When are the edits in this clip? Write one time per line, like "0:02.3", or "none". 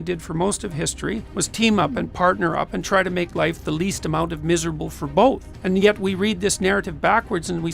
0:01.3
0:05.5